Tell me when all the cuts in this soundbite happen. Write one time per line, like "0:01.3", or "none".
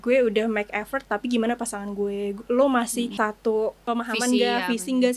none